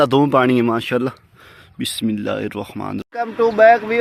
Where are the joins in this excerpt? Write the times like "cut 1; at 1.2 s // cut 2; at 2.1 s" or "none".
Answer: cut 1; at 3.1 s